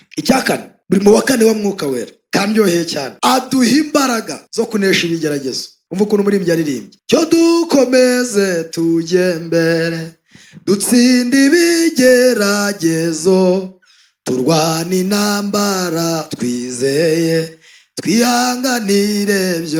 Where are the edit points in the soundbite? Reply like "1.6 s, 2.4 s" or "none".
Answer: none